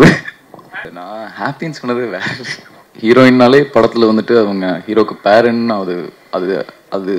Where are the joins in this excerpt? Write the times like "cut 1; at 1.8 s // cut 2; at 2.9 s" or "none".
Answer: cut 1; at 0.9 s // cut 2; at 2.8 s